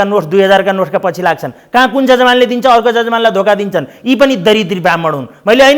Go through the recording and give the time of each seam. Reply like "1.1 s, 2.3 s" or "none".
none